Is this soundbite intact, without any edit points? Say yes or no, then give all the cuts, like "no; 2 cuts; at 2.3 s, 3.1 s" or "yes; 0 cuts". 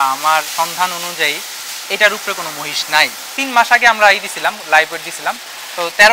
no; 1 cut; at 3.4 s